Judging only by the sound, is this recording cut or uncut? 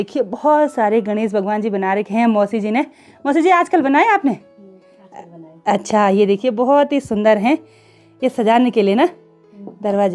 uncut